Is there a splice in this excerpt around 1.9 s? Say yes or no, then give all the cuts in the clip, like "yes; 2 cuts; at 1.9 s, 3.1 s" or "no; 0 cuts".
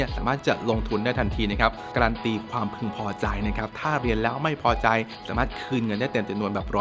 yes; 2 cuts; at 1.9 s, 5.2 s